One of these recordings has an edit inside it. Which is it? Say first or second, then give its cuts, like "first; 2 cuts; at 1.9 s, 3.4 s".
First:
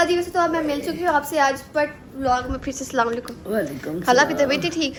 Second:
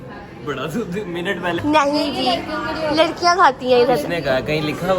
second; 1 cut; at 1.6 s